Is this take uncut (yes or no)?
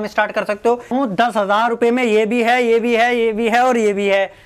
no